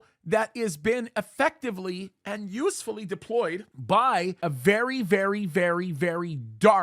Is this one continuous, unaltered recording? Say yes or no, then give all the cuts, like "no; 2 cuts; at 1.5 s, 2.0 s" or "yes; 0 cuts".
no; 1 cut; at 4.4 s